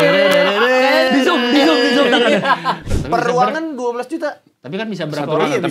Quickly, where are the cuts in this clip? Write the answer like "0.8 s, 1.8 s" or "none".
2.9 s